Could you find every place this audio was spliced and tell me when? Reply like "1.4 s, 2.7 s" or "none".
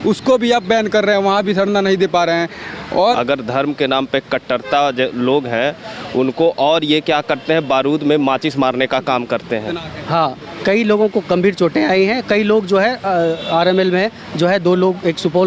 3.2 s, 9.8 s